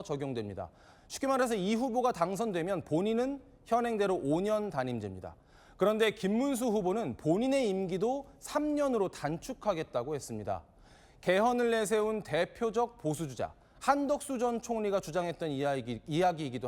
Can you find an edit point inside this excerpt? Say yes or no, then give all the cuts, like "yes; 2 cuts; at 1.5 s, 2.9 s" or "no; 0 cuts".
no; 0 cuts